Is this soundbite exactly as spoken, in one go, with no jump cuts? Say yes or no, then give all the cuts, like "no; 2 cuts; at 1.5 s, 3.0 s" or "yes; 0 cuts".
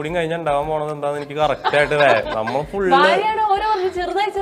yes; 0 cuts